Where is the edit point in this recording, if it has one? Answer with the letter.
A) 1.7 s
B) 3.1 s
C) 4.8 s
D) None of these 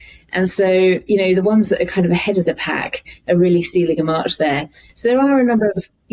C